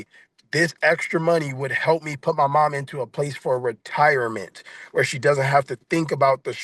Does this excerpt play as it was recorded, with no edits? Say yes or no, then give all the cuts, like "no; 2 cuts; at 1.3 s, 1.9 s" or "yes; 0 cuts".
yes; 0 cuts